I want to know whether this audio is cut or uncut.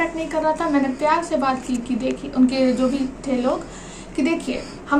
uncut